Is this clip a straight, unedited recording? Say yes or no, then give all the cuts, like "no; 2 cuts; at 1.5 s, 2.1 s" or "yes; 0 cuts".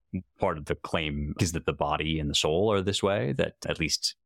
no; 1 cut; at 1.3 s